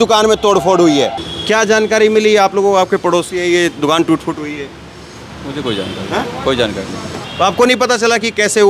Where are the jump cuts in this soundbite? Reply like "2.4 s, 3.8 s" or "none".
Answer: 1.2 s, 7.2 s